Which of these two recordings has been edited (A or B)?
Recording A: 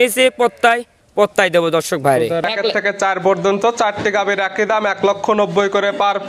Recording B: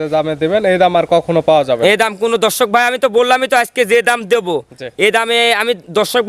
A